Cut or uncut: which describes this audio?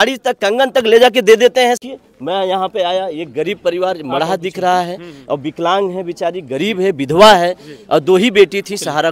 cut